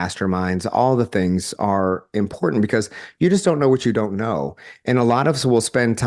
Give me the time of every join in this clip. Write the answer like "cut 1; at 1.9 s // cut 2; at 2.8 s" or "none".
none